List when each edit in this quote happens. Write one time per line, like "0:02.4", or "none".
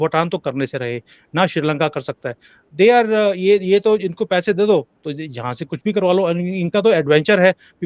none